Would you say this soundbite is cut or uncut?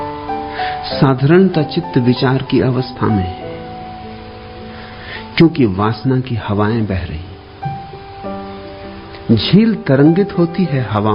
cut